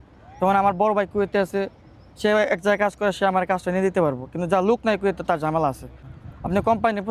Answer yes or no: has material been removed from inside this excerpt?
yes